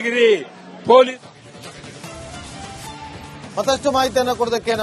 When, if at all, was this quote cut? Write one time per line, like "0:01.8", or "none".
none